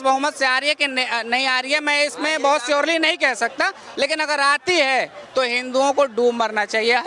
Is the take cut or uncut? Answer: cut